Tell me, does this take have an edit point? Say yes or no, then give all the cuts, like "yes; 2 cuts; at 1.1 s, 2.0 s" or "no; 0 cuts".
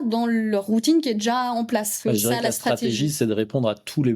yes; 1 cut; at 1.9 s